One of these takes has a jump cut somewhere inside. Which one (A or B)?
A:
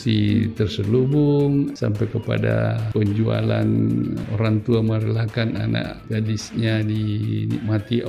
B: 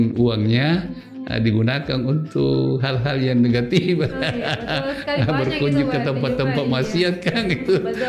A